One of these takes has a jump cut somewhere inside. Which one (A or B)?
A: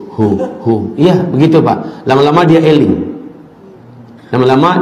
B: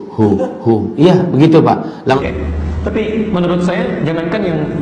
B